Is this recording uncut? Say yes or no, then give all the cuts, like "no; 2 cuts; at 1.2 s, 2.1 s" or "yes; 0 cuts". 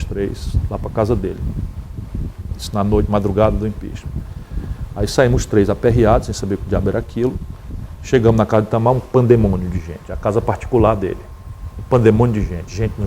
yes; 0 cuts